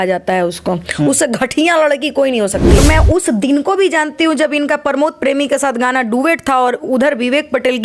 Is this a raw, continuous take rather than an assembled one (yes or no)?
no